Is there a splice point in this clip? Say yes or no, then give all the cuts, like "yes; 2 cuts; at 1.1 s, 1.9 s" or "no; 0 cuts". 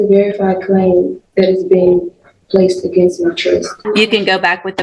yes; 1 cut; at 3.7 s